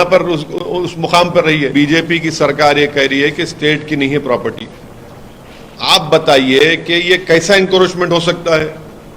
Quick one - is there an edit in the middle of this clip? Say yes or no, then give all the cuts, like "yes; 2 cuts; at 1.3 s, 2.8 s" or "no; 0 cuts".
yes; 1 cut; at 1.7 s